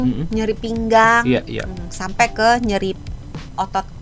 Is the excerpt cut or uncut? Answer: uncut